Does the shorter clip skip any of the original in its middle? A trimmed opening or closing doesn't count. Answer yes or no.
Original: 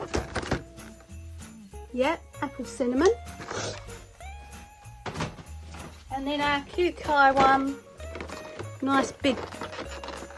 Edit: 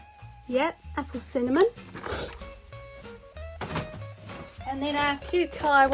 no